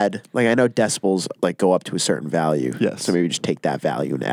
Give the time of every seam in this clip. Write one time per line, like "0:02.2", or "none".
none